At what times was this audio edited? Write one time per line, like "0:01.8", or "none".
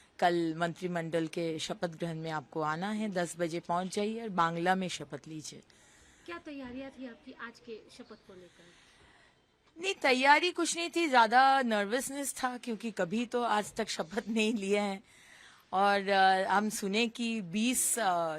none